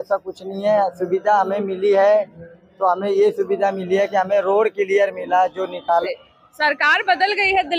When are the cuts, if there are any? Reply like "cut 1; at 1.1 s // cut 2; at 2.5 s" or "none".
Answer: cut 1; at 6.0 s